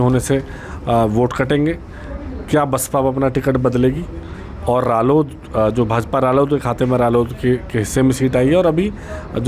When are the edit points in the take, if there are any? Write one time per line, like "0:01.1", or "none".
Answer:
none